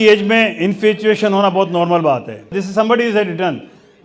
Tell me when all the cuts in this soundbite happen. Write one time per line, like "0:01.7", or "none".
0:02.6